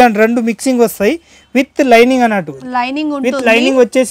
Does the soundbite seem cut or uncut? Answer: uncut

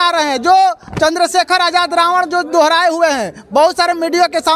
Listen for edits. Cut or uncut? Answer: uncut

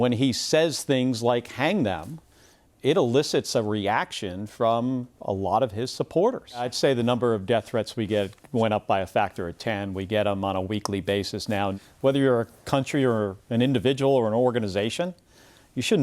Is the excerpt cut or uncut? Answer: cut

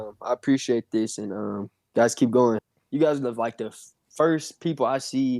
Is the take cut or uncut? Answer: cut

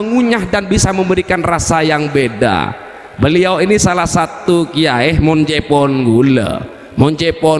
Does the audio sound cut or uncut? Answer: uncut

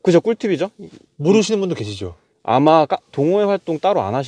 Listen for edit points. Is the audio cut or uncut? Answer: uncut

